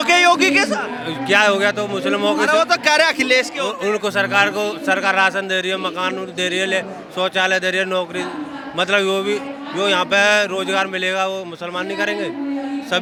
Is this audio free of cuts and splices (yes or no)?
yes